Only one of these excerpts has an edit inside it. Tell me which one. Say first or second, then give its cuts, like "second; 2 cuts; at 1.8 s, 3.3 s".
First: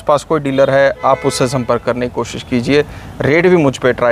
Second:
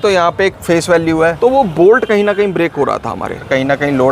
second; 2 cuts; at 1.4 s, 3.1 s